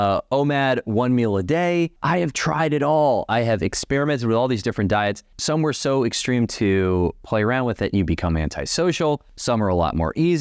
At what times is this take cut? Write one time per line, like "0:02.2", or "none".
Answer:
0:02.0
0:05.3
0:09.3